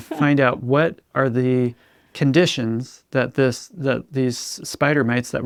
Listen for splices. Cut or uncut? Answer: uncut